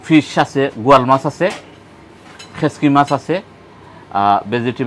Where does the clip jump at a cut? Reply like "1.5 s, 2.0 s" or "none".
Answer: none

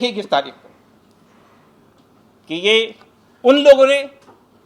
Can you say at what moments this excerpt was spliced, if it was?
none

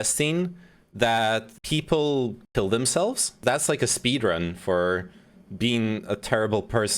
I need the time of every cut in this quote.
3.3 s

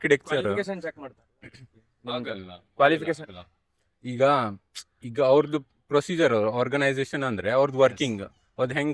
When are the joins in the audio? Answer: none

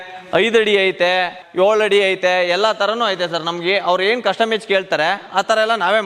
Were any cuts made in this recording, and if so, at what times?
1.4 s

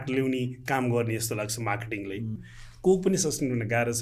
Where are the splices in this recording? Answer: 2.4 s

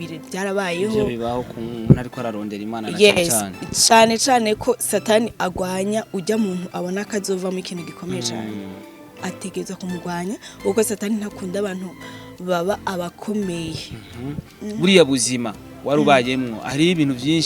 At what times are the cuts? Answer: 14.4 s

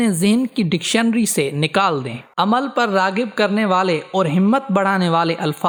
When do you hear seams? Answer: none

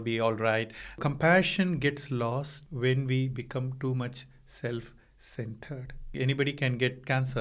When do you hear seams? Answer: 1.0 s, 2.6 s, 6.1 s

